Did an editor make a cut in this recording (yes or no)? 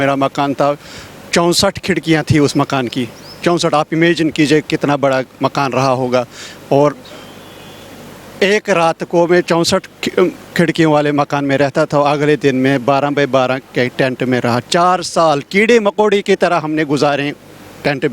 no